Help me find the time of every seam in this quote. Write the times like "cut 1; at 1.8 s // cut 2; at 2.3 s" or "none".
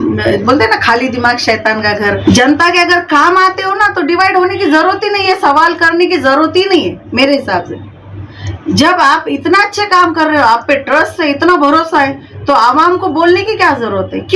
cut 1; at 2.2 s